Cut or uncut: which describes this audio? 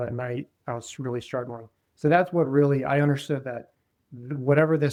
uncut